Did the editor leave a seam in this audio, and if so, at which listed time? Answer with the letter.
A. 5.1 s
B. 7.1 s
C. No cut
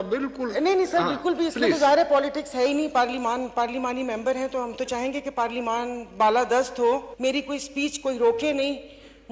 B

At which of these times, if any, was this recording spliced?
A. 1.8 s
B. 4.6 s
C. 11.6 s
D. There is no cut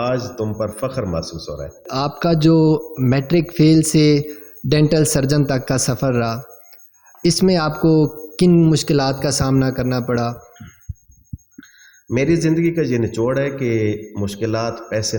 D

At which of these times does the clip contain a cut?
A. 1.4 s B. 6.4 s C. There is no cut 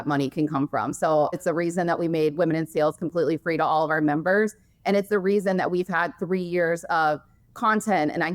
A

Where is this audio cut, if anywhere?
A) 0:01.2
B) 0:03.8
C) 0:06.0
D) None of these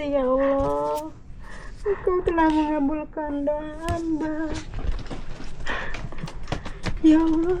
D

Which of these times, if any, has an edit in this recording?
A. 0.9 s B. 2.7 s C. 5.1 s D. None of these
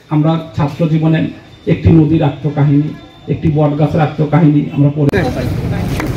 C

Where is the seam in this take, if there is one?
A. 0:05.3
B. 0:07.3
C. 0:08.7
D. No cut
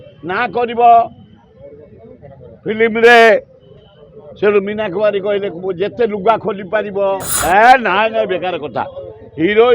B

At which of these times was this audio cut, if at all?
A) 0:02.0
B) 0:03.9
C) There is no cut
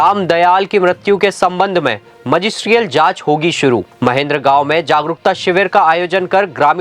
B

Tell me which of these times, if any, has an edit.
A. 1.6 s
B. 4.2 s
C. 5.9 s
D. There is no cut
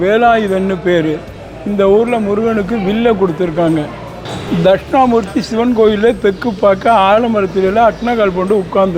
B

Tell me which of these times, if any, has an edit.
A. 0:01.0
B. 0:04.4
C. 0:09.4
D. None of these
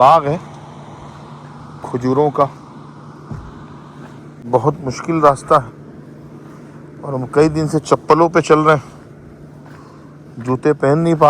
B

